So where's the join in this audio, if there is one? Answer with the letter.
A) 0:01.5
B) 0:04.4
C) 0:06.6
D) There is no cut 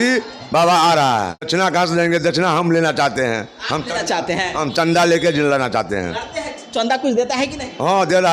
A